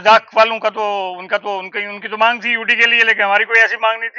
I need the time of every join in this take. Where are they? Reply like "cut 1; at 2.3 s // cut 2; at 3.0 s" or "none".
none